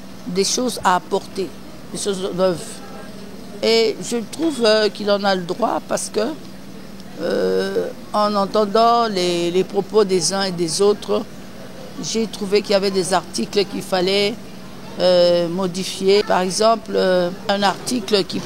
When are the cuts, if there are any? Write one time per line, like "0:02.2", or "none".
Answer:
0:16.2
0:17.5